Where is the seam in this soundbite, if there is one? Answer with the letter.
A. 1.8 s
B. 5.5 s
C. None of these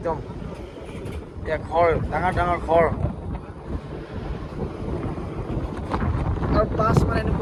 C